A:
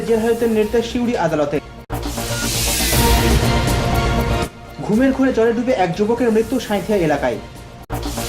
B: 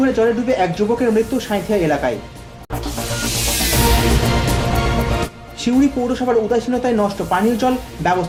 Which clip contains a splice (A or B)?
A